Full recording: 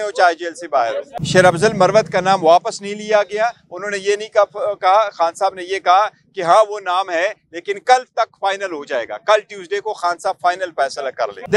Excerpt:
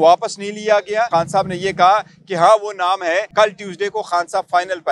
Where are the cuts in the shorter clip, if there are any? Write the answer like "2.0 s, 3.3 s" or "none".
1.1 s, 3.3 s